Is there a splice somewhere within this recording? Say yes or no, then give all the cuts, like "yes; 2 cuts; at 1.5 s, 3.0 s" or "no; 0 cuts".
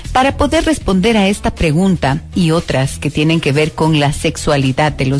yes; 1 cut; at 4.1 s